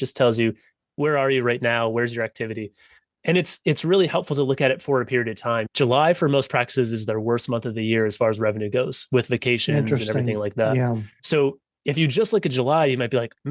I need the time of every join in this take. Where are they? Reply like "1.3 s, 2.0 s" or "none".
5.7 s

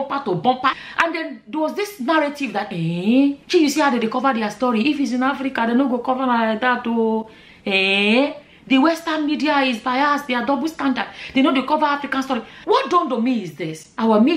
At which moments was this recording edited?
0.8 s, 12.6 s

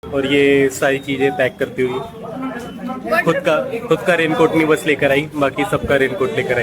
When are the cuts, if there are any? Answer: none

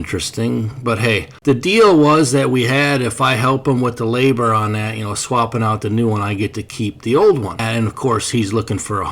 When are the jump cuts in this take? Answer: 1.4 s, 7.6 s

